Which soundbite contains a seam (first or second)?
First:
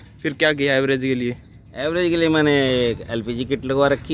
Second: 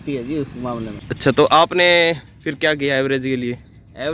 second